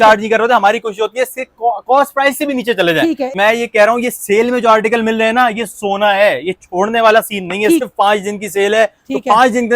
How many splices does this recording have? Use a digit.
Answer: 2